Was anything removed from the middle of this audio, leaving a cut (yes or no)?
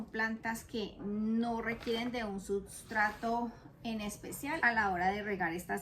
yes